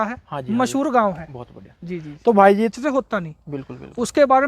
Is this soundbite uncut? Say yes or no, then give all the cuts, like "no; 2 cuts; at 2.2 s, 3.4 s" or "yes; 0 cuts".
no; 1 cut; at 2.7 s